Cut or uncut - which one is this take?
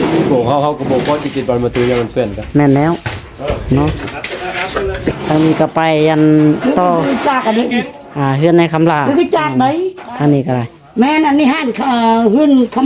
cut